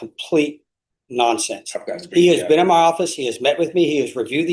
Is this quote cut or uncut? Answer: uncut